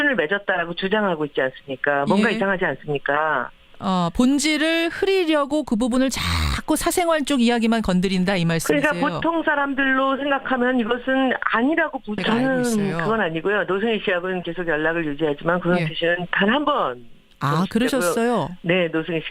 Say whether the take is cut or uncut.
uncut